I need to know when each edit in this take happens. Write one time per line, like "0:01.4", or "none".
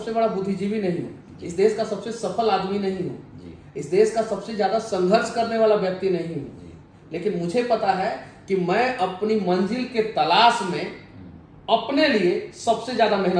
none